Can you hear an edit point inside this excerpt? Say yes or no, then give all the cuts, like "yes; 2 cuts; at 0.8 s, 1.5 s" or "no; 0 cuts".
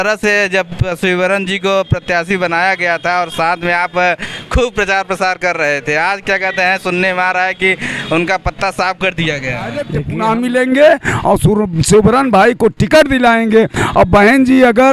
yes; 1 cut; at 10.0 s